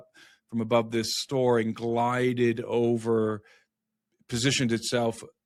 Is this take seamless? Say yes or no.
yes